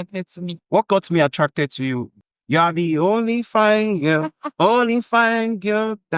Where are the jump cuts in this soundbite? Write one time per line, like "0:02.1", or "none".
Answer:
0:02.2